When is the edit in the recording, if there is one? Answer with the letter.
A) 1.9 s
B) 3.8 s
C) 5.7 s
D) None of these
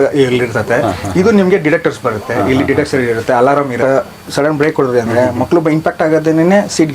B